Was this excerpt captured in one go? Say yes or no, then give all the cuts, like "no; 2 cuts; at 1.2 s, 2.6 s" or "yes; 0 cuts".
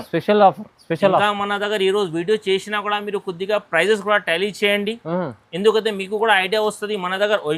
yes; 0 cuts